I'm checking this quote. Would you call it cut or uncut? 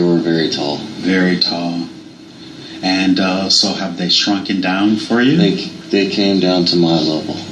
cut